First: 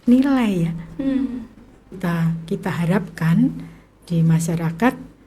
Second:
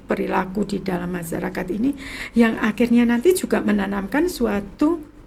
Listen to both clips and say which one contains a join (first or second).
first